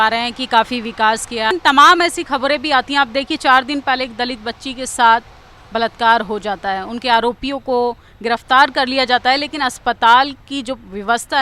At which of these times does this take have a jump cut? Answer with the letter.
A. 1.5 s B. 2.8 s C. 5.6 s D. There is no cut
A